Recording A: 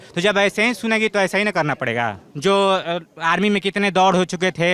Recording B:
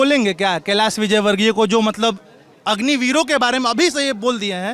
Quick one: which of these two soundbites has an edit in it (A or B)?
A